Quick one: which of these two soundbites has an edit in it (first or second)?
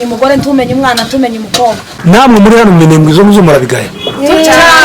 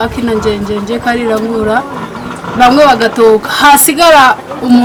first